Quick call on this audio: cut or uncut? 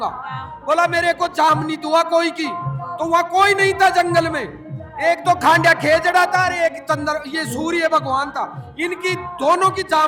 uncut